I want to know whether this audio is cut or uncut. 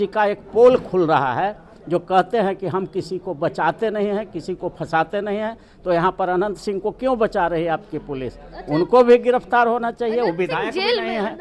uncut